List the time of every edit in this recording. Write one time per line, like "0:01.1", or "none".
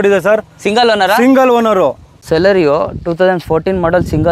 0:02.1